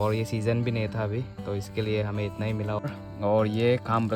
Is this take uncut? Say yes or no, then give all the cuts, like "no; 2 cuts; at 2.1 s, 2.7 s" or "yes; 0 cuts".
no; 1 cut; at 2.9 s